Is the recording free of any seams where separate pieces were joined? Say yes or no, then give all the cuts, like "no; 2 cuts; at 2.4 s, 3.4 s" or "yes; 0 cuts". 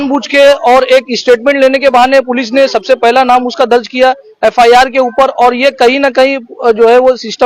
yes; 0 cuts